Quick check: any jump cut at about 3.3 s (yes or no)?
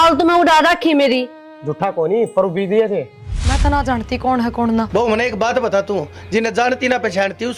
yes